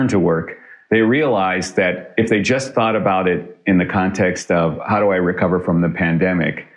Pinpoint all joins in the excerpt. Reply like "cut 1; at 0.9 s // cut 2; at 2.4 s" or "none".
cut 1; at 2.0 s